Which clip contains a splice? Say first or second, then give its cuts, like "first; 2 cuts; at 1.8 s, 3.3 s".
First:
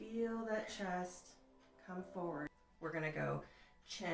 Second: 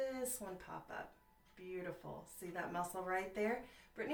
first; 1 cut; at 2.5 s